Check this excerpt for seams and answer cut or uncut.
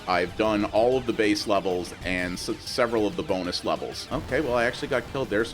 cut